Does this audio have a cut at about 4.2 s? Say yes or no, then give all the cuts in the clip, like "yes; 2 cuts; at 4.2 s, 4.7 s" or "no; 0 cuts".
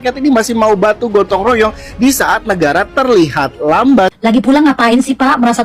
yes; 1 cut; at 4.2 s